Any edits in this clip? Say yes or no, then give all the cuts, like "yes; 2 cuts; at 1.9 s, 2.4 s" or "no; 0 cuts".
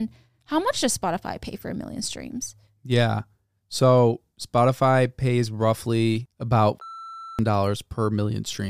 yes; 1 cut; at 6.3 s